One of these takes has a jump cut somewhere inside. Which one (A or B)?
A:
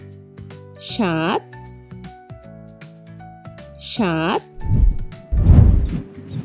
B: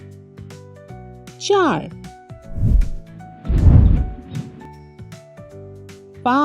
B